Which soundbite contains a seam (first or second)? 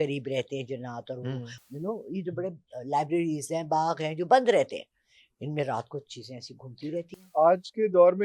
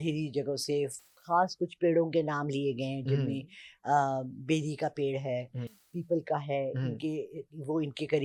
first